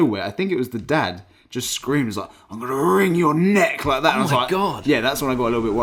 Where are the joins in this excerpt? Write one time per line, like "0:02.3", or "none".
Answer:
none